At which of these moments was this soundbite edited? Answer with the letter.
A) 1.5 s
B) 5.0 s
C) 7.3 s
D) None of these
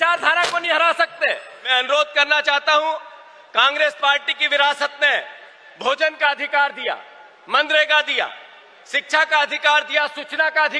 A